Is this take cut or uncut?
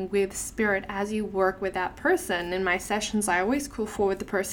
uncut